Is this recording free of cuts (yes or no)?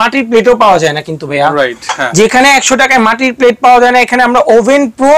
yes